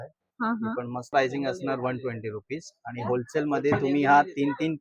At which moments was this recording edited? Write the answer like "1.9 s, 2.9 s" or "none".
1.1 s